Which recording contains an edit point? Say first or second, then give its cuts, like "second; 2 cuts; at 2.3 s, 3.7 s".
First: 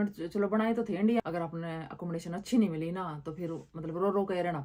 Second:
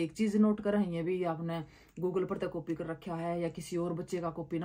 first; 1 cut; at 1.2 s